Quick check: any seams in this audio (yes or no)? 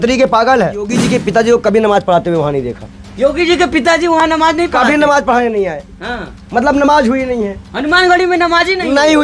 yes